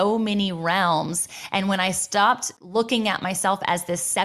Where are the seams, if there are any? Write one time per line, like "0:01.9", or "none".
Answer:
none